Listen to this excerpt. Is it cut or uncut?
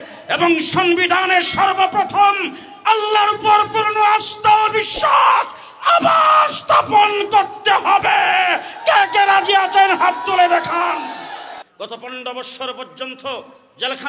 cut